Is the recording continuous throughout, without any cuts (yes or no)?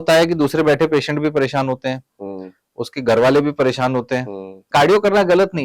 no